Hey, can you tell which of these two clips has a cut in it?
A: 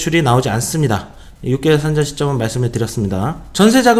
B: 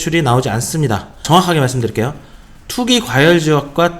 B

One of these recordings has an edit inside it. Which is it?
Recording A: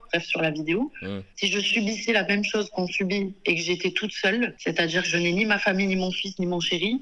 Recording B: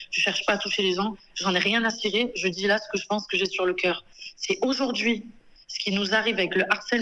A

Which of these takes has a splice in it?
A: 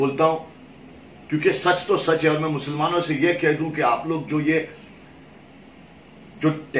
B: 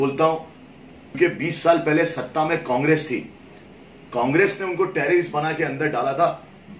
B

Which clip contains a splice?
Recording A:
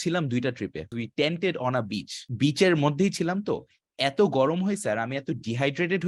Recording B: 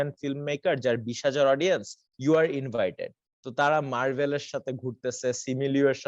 A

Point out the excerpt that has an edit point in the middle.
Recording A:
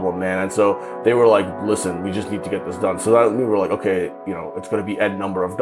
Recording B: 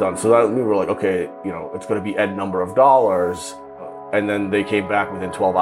B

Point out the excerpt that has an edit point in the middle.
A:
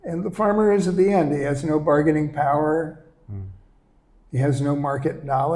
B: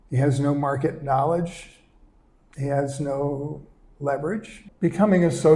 B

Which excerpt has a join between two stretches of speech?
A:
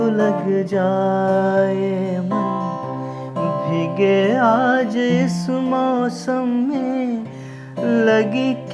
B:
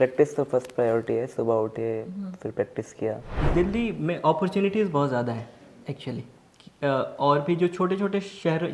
B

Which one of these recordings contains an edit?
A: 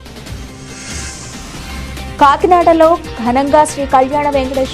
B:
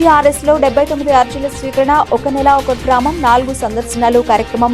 A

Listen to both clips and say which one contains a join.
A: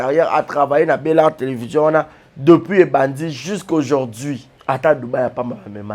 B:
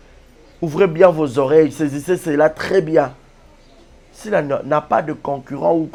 A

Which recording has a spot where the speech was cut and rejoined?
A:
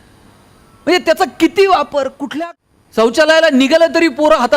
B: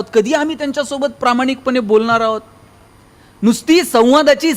A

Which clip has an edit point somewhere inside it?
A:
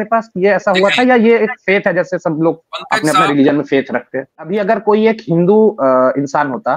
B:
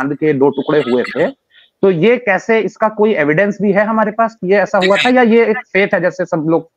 A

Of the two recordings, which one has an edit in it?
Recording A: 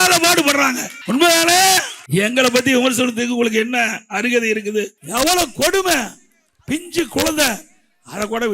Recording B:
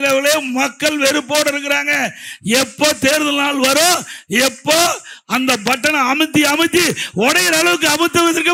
A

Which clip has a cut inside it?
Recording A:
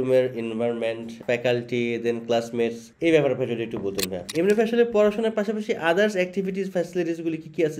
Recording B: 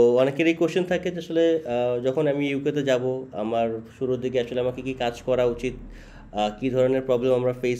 A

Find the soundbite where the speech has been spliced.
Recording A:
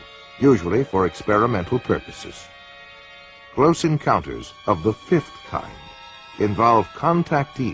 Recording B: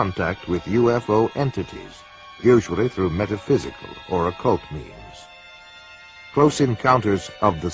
A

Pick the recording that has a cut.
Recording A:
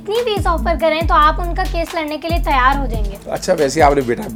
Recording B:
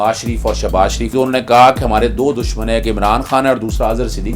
B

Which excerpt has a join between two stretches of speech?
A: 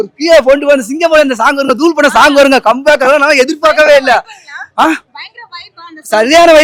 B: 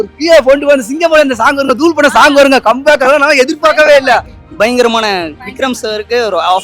B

